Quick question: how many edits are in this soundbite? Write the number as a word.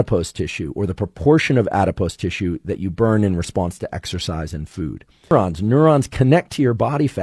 one